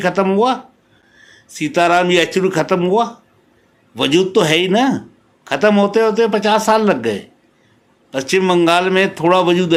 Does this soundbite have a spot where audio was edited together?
no; 0 cuts

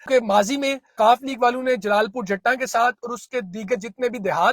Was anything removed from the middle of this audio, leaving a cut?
yes; 1 cut; at 0.9 s

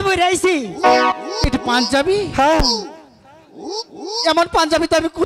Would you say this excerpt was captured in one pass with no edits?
yes; 0 cuts

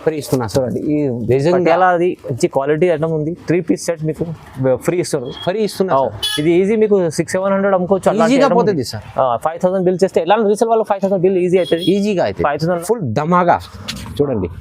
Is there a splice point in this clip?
yes; 1 cut; at 12.8 s

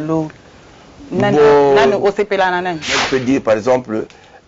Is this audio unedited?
no; 1 cut; at 3.0 s

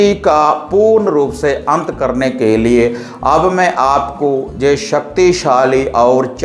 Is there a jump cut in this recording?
no; 0 cuts

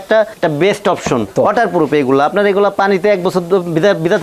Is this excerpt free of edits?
no; 1 cut; at 1.3 s

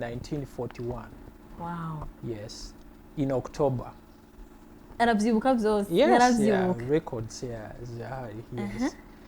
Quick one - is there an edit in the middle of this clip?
no; 0 cuts

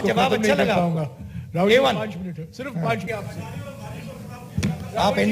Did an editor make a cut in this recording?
yes; 1 cut; at 3.1 s

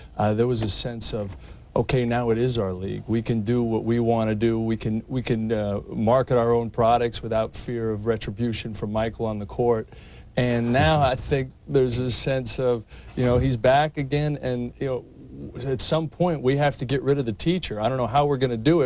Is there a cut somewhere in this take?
no; 0 cuts

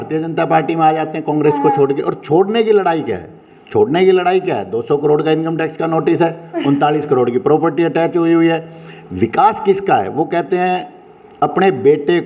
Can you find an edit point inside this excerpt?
no; 0 cuts

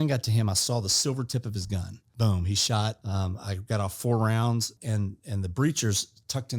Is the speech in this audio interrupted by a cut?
yes; 3 cuts; at 2.1 s, 3.0 s, 4.8 s

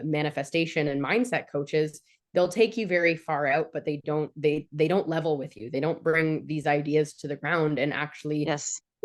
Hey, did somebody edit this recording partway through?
no; 0 cuts

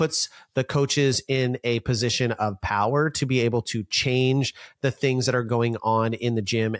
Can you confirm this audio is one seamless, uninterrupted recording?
yes; 0 cuts

